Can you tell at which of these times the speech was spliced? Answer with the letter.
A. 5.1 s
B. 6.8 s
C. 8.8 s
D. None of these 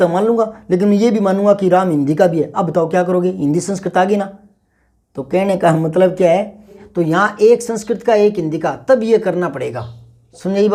B